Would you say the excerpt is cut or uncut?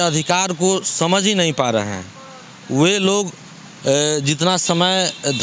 uncut